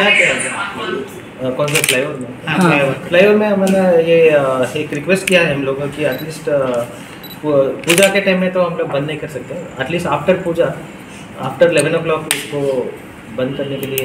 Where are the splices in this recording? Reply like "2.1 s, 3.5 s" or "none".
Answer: none